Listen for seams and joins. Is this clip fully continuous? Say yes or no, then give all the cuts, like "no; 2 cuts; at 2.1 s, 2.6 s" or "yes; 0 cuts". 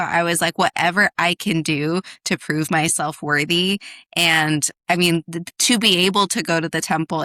yes; 0 cuts